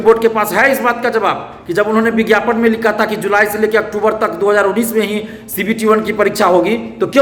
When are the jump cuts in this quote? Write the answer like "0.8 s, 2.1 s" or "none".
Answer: none